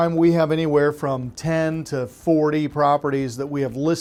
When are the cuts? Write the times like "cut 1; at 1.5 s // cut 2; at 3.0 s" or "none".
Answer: none